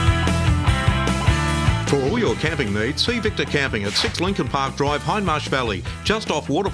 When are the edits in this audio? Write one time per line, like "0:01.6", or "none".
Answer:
none